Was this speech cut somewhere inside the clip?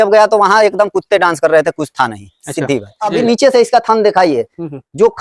yes; 1 cut; at 3.0 s

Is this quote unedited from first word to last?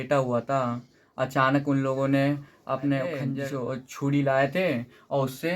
no; 1 cut; at 3.3 s

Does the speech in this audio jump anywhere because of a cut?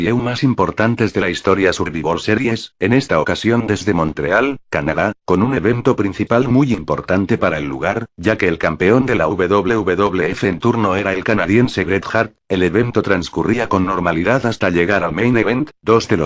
no; 0 cuts

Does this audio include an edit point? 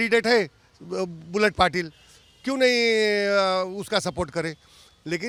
no; 0 cuts

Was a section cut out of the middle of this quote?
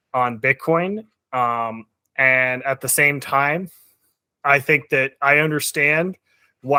no; 0 cuts

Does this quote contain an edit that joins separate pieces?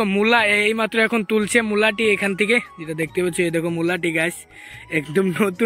no; 0 cuts

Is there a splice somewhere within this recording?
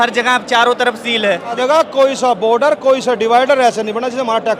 yes; 1 cut; at 1.6 s

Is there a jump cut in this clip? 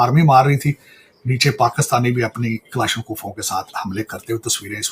no; 0 cuts

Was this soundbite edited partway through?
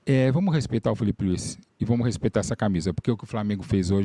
no; 0 cuts

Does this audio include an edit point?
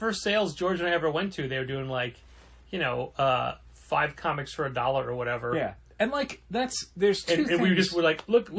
no; 0 cuts

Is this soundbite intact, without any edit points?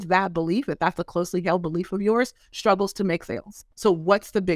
no; 1 cut; at 3.6 s

